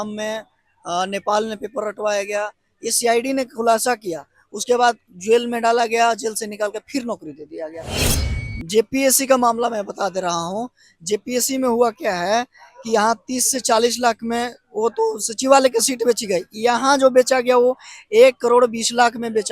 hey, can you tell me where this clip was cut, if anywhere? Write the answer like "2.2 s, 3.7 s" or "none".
8.0 s